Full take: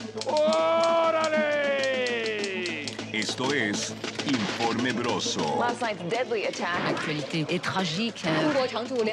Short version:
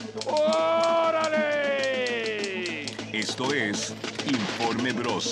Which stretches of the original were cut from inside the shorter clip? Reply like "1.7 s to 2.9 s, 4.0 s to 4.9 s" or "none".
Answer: none